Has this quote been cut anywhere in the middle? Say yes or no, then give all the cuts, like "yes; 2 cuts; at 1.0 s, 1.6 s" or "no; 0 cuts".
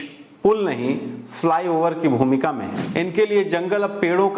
yes; 1 cut; at 2.8 s